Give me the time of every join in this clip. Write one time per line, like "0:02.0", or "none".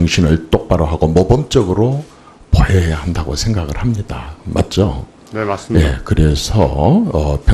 0:02.9